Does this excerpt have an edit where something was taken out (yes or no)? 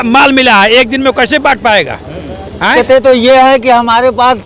yes